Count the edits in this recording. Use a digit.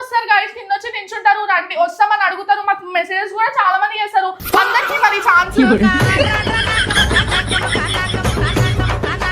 0